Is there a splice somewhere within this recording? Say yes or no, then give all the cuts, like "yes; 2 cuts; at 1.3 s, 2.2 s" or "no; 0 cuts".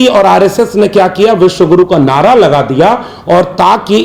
no; 0 cuts